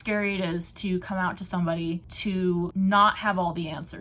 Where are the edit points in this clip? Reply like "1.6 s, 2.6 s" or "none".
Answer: 2.0 s